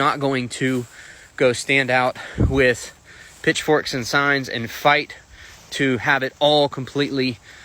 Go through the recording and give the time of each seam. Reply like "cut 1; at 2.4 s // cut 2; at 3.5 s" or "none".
none